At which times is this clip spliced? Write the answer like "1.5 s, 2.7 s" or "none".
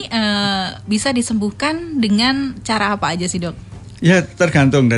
none